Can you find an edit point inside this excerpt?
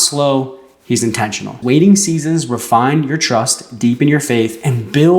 yes; 1 cut; at 1.5 s

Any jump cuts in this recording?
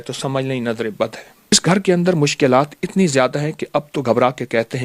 yes; 1 cut; at 1.5 s

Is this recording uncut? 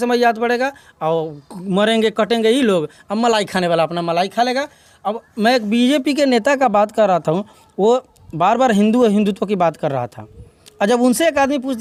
yes; 0 cuts

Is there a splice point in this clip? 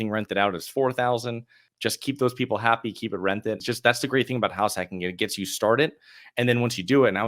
yes; 2 cuts; at 1.6 s, 3.6 s

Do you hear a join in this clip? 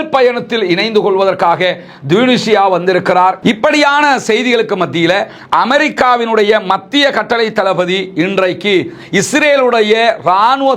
yes; 1 cut; at 3.4 s

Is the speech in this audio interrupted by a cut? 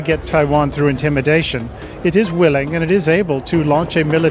no; 0 cuts

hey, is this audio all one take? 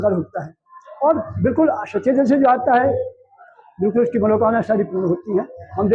yes; 0 cuts

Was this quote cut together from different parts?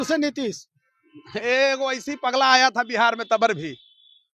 no; 0 cuts

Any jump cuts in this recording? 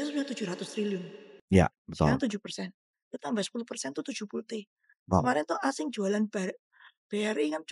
no; 0 cuts

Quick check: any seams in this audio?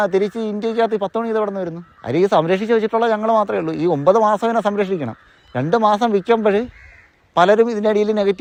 no; 0 cuts

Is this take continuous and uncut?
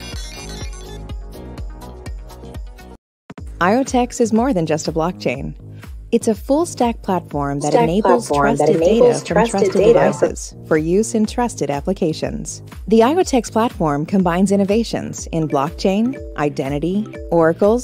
no; 1 cut; at 3.0 s

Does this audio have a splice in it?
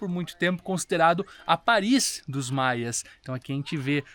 no; 0 cuts

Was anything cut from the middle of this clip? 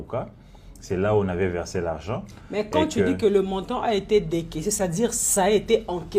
no; 0 cuts

